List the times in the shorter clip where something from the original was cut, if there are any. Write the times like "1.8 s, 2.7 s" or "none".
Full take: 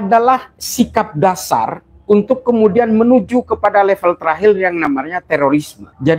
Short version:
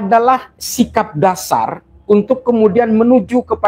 none